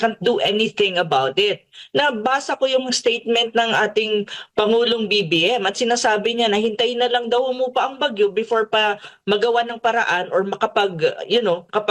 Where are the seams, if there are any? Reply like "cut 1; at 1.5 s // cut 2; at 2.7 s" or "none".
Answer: none